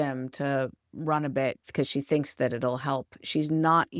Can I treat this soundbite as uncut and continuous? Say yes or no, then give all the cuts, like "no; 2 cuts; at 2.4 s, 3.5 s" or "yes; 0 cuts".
no; 1 cut; at 1.6 s